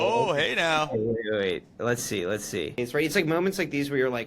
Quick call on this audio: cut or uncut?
cut